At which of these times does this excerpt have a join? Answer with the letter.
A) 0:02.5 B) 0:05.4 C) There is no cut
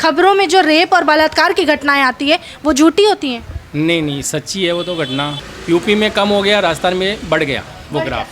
B